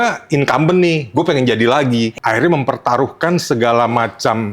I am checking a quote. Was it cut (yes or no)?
yes